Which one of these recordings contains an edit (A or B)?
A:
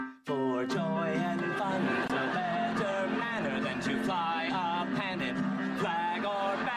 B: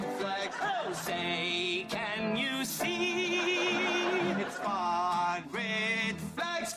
A